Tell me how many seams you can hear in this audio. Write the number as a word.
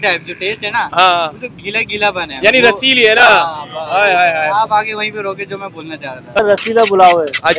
one